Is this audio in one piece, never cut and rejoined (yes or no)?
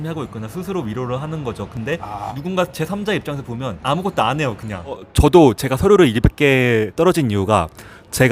no